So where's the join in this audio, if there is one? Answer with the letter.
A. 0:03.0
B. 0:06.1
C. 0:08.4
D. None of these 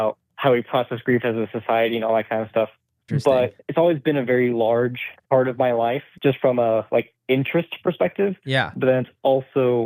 A